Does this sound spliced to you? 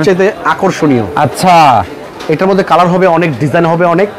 no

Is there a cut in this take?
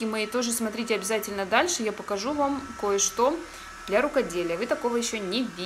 no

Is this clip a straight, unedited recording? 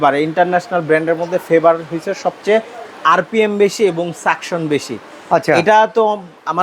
yes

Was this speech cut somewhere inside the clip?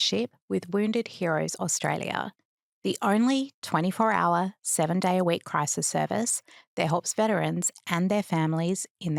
no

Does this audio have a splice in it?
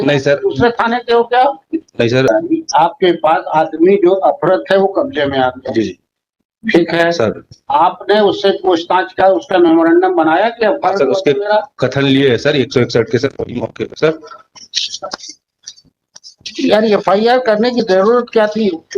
yes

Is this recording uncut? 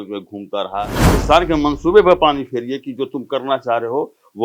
no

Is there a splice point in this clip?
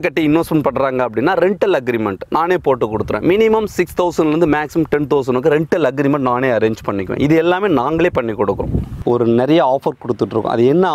yes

